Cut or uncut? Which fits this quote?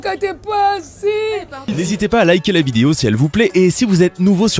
cut